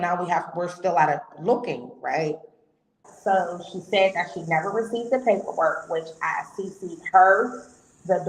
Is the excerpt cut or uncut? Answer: cut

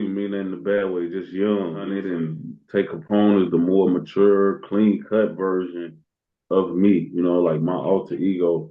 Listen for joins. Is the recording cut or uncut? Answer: cut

